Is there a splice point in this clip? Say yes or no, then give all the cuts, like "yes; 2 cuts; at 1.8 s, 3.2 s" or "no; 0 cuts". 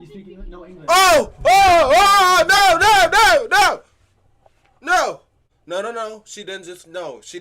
no; 0 cuts